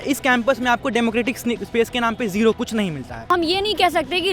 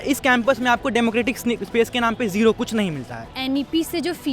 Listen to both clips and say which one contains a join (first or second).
second